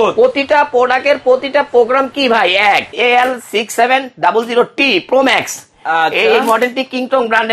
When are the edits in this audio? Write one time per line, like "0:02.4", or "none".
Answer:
0:02.9